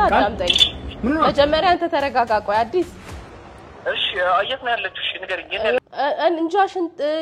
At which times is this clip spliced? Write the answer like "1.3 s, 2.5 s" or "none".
5.8 s